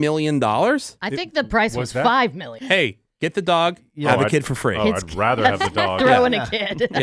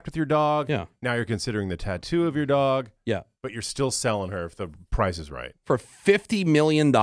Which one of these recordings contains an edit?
first; 1 cut; at 2.5 s

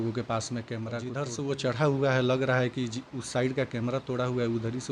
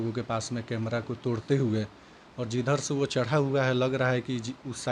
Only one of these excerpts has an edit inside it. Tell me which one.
first; 1 cut; at 1.0 s

